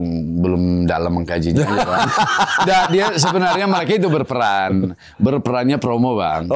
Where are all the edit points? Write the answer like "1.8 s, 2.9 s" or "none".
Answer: none